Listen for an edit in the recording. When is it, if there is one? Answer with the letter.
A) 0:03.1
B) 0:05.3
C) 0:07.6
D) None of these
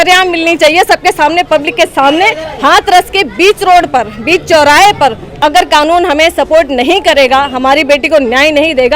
B